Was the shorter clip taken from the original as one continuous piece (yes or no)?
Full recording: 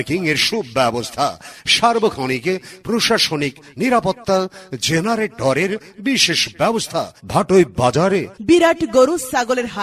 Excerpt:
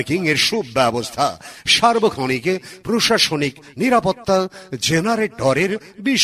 yes